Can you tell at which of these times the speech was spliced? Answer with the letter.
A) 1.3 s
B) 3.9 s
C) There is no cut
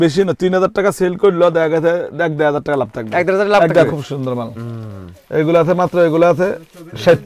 B